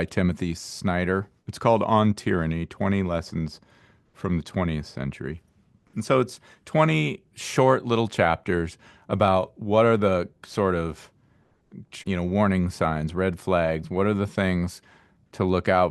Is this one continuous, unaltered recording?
no; 1 cut; at 1.4 s

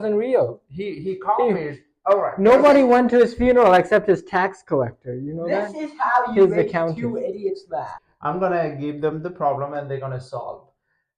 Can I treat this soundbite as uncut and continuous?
no; 1 cut; at 8.0 s

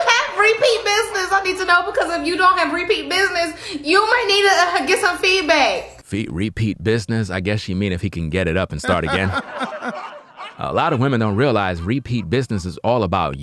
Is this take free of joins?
yes; 0 cuts

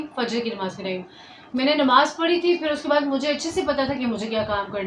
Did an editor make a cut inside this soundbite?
no; 0 cuts

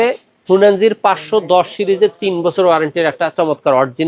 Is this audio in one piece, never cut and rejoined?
yes; 0 cuts

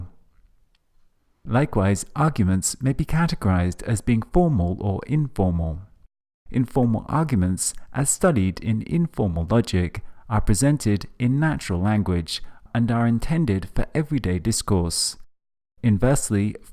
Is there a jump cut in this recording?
no; 0 cuts

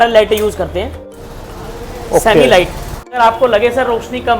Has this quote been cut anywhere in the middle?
yes; 2 cuts; at 1.1 s, 3.1 s

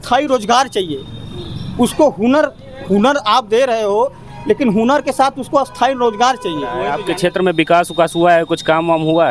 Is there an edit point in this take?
yes; 1 cut; at 7.0 s

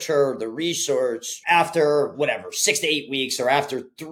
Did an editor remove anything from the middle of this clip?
no; 0 cuts

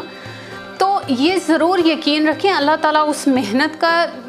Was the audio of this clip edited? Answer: no; 0 cuts

